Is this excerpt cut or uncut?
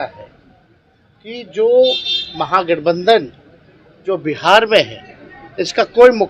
uncut